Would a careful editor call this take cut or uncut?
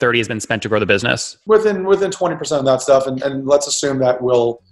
cut